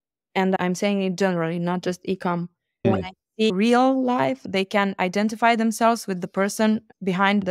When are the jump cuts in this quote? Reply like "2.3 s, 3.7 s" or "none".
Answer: none